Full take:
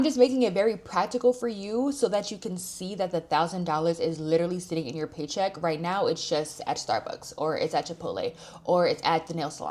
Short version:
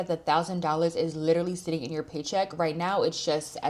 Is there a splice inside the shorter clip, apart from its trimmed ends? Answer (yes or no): no